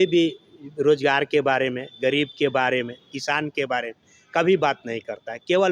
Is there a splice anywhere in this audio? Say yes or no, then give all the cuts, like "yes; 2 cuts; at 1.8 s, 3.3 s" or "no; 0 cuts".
no; 0 cuts